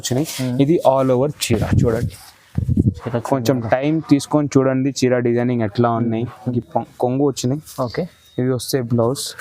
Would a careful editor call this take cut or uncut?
cut